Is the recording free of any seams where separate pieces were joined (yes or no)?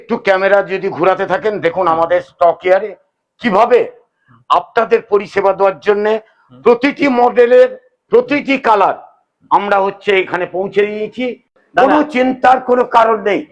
no